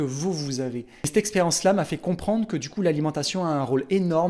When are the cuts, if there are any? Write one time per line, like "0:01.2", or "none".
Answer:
0:01.1